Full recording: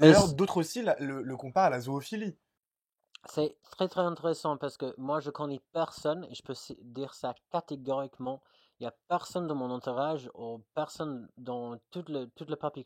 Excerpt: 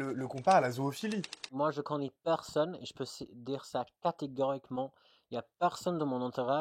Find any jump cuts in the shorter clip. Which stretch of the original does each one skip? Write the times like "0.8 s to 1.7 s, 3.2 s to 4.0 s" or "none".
2.6 s to 5.0 s